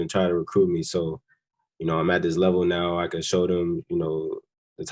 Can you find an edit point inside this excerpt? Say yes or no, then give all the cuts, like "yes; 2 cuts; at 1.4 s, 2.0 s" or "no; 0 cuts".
no; 0 cuts